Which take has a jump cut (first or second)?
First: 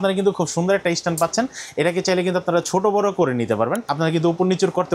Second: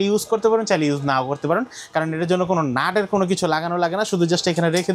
first